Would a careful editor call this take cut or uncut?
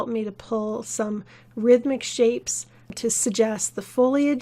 cut